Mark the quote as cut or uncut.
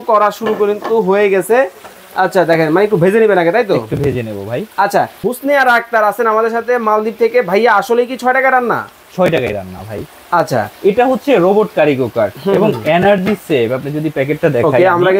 uncut